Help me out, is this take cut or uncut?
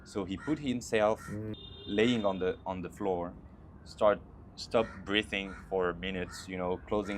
cut